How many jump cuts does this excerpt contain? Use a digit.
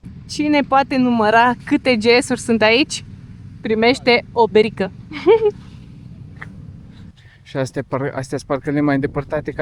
1